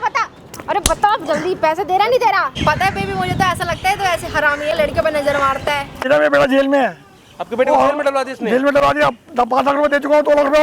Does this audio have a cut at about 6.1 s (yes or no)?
yes